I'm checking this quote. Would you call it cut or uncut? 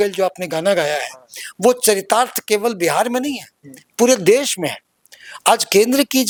uncut